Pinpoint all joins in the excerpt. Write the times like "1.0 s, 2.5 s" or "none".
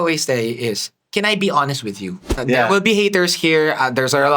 2.3 s